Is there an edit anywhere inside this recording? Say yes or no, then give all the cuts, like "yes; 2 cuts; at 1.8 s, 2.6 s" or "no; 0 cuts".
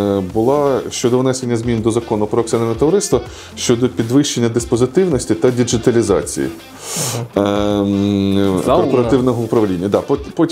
no; 0 cuts